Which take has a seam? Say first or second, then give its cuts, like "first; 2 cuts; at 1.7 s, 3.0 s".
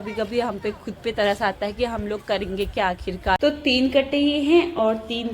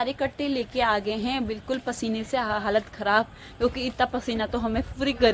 first; 1 cut; at 3.4 s